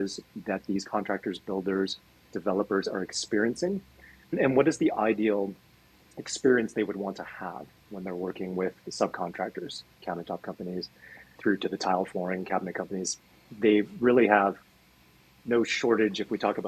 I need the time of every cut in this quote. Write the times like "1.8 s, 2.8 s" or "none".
4.4 s, 11.3 s, 13.4 s